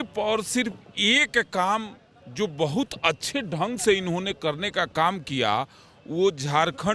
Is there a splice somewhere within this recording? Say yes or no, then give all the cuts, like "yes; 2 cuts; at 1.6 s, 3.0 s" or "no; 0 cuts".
no; 0 cuts